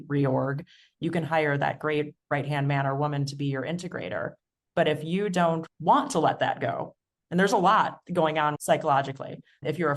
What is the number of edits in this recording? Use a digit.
2